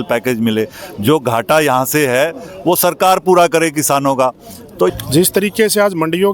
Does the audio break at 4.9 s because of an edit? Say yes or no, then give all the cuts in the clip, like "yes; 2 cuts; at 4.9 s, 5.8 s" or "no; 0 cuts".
yes; 1 cut; at 4.9 s